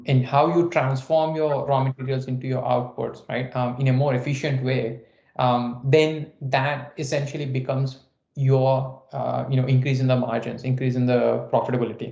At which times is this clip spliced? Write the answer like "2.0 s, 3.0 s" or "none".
none